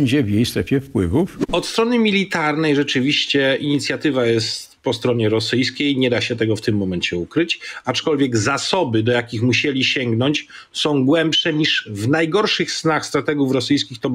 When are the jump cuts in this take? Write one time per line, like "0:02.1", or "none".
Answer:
0:01.4